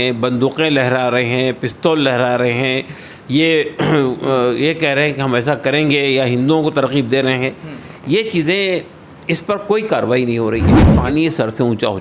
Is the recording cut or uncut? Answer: cut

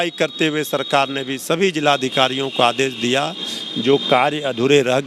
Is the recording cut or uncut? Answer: uncut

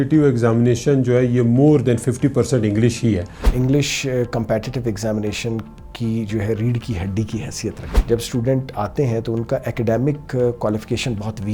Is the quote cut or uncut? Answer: cut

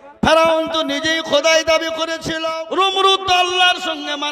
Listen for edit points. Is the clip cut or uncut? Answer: cut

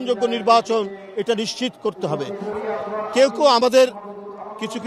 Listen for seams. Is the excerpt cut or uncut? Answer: cut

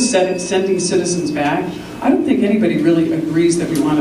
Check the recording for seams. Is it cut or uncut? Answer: uncut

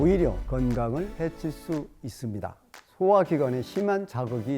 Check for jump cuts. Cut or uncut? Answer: cut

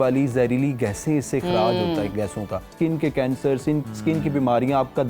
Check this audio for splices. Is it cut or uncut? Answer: cut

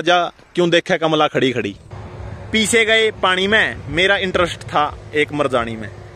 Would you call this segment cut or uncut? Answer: cut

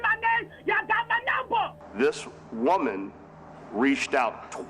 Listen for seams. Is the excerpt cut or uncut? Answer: cut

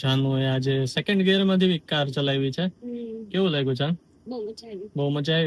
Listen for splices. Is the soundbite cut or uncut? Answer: uncut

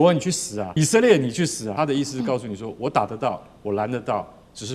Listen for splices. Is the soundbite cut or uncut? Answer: cut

